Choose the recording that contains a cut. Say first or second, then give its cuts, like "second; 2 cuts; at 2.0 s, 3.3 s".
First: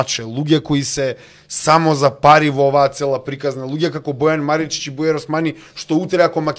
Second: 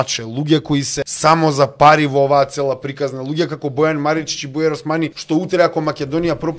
second; 2 cuts; at 0.9 s, 5.2 s